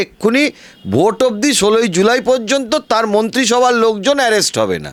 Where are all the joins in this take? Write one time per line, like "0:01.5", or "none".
none

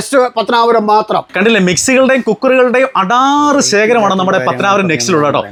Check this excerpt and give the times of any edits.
none

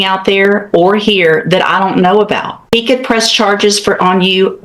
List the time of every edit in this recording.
0:02.7

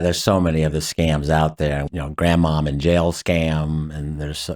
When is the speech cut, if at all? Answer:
0:01.9

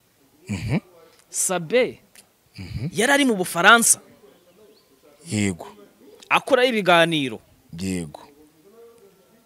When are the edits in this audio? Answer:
none

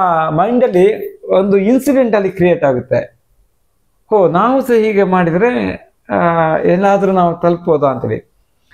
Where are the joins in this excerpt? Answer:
none

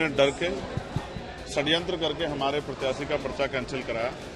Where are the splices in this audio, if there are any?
none

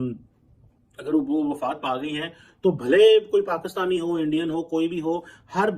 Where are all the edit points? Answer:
none

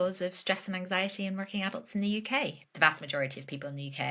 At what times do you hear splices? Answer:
0:02.6

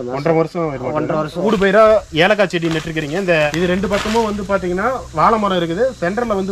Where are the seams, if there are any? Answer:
0:01.4
0:03.4

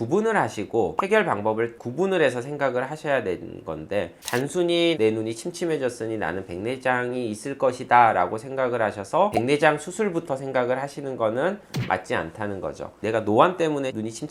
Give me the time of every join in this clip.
0:12.9

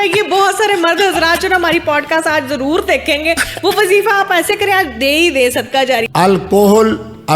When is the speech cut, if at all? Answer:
0:06.0

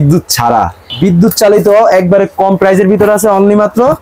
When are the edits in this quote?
0:00.9

